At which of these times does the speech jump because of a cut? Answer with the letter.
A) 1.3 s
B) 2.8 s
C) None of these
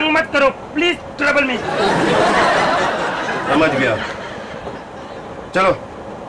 C